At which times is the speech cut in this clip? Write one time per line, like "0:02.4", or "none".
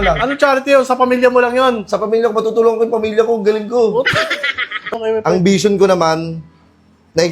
0:04.9